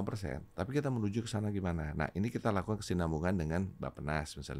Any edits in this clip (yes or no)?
no